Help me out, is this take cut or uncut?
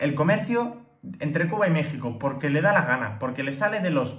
uncut